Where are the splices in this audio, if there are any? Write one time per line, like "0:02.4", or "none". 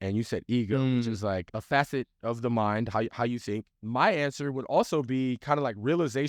0:01.5
0:03.7